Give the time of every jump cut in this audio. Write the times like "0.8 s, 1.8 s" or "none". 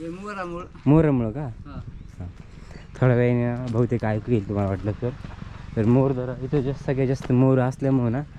none